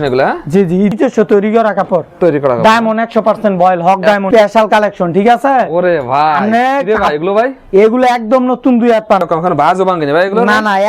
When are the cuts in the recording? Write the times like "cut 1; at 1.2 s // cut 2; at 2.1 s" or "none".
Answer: cut 1; at 0.9 s // cut 2; at 4.2 s // cut 3; at 9.2 s